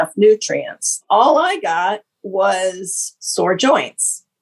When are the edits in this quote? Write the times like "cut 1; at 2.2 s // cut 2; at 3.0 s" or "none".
cut 1; at 1.0 s